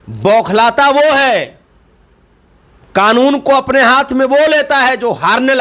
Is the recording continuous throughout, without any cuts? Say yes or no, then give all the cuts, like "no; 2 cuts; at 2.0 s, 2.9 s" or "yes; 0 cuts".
yes; 0 cuts